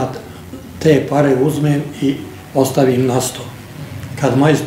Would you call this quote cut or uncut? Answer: uncut